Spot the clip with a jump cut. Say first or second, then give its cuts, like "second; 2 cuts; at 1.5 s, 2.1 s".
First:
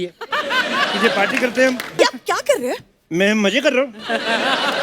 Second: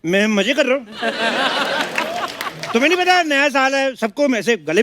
first; 1 cut; at 1.9 s